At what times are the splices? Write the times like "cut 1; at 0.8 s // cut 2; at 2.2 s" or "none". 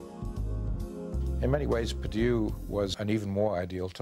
cut 1; at 3.0 s